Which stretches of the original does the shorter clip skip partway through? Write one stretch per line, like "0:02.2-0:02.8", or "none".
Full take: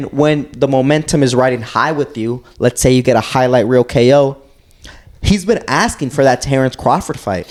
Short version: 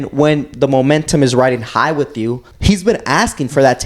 0:02.4-0:05.0